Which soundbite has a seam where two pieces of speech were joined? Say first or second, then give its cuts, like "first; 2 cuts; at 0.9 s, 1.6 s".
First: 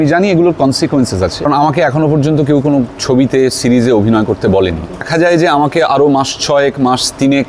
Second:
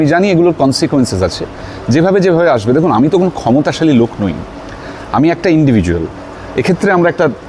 first; 2 cuts; at 1.5 s, 5.1 s